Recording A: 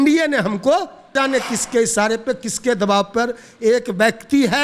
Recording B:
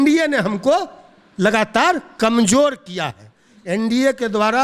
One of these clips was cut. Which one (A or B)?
A